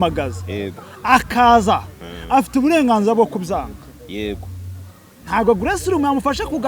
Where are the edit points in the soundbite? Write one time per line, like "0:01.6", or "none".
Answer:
none